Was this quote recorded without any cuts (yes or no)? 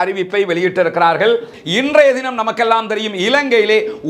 no